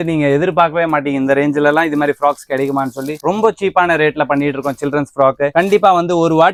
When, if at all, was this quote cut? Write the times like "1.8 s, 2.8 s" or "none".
none